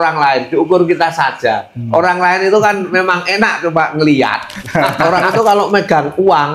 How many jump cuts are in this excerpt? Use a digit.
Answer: 1